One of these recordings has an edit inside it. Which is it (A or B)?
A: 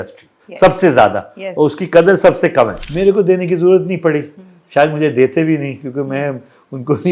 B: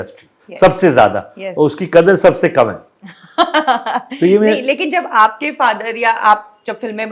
A